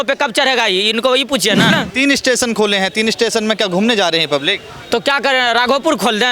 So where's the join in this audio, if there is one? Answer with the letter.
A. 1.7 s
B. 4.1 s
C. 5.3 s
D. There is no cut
A